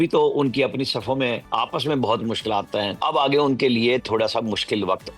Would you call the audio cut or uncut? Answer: cut